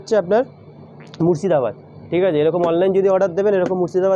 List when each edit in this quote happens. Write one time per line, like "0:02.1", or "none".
none